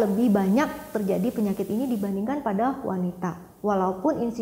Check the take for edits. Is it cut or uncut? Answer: uncut